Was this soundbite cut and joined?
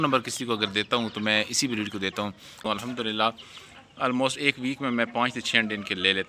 yes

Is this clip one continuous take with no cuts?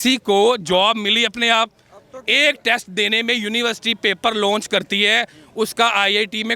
yes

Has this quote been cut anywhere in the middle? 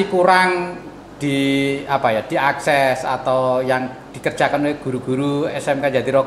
no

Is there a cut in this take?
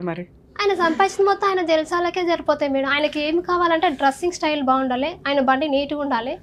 no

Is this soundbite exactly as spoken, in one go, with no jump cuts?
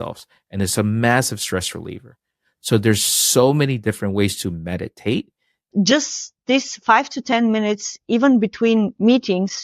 no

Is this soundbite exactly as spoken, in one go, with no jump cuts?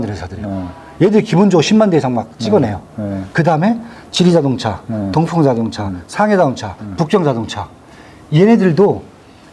yes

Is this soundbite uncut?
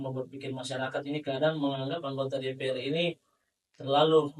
yes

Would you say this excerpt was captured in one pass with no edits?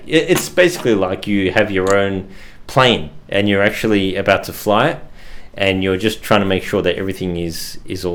yes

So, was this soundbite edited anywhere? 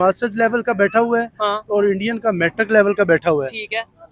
no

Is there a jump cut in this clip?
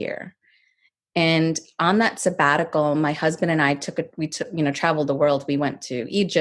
no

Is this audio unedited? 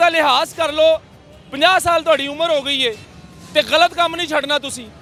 yes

